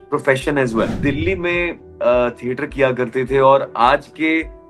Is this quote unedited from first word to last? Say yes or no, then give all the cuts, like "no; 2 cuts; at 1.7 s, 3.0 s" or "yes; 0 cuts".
no; 1 cut; at 1.0 s